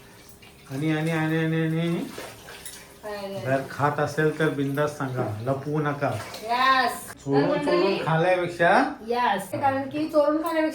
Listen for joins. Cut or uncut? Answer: cut